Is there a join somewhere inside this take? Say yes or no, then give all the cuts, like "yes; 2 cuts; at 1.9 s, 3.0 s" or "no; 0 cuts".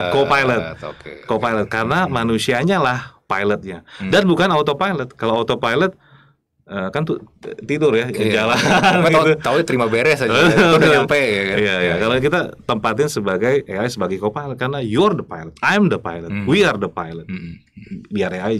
no; 0 cuts